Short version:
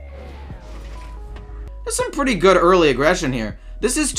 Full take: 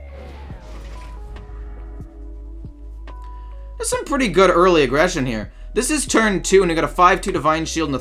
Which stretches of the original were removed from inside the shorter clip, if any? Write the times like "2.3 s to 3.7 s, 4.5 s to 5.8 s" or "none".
1.7 s to 3.6 s